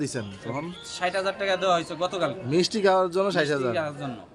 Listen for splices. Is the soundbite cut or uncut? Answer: uncut